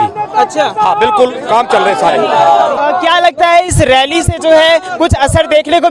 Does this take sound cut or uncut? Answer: cut